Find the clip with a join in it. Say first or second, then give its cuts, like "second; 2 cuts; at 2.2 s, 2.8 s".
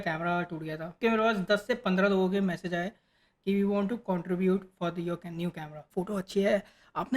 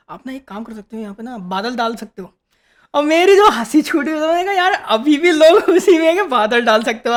first; 2 cuts; at 1.0 s, 5.9 s